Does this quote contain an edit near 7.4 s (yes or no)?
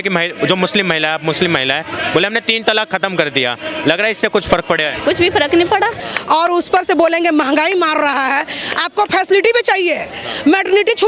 no